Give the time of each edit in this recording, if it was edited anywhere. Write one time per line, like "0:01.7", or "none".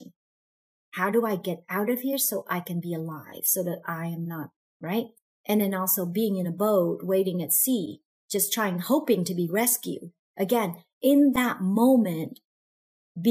0:05.3